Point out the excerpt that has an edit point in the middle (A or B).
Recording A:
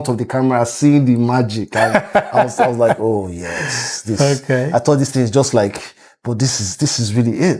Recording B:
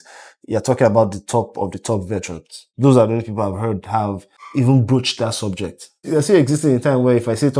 B